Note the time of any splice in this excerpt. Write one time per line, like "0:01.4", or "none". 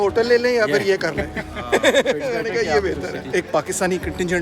0:03.2